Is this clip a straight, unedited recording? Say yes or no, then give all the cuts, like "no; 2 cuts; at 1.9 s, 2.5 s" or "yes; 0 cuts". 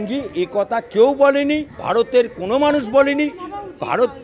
no; 1 cut; at 1.7 s